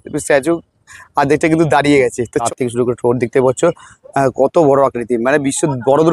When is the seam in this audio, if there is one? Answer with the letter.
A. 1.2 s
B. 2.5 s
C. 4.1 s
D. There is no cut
B